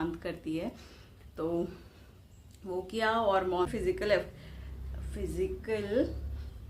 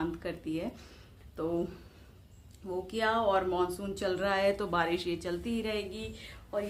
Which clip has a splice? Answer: first; 1 cut; at 3.7 s

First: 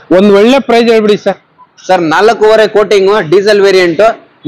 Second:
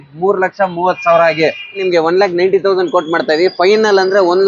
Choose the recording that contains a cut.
second; 1 cut; at 1.8 s

